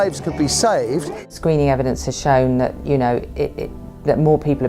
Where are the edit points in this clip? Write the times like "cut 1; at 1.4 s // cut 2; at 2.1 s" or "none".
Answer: cut 1; at 1.3 s